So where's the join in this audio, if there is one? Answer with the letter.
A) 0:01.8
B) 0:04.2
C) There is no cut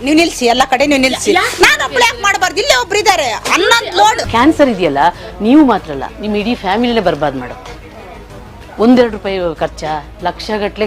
B